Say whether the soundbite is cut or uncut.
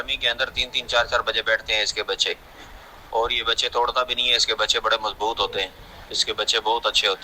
uncut